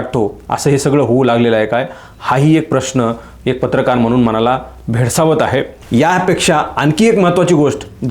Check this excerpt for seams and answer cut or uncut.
cut